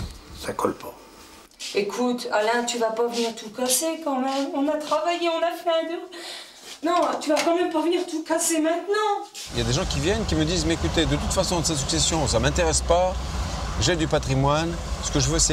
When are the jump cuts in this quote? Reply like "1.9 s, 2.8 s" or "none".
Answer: 1.7 s, 6.7 s, 9.4 s